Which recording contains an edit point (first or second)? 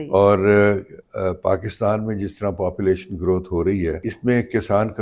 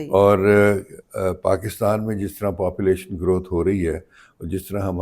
first